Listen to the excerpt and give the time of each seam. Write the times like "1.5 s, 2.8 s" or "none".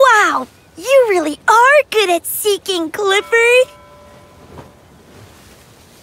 3.8 s